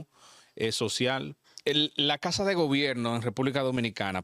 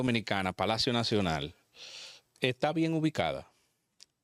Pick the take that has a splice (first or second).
first